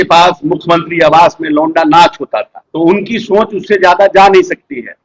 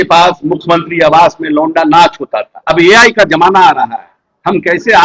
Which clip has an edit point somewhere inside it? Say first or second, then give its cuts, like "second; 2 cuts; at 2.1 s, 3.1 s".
second; 1 cut; at 2.5 s